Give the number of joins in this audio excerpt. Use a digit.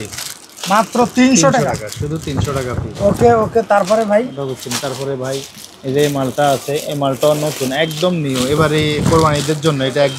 0